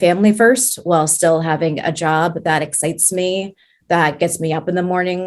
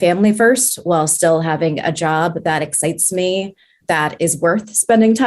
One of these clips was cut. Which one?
second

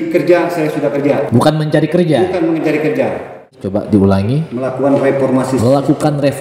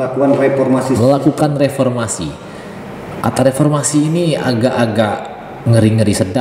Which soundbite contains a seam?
first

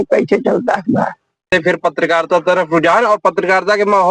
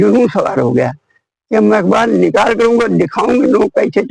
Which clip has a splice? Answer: first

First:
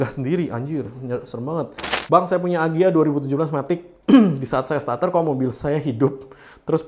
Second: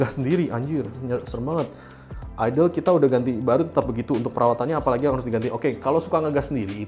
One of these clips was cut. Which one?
first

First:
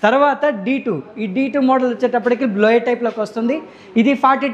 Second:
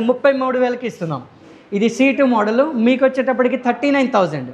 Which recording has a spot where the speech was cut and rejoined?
second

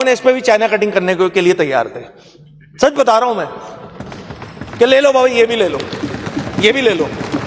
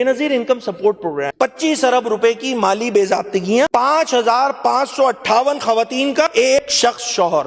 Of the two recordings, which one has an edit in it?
second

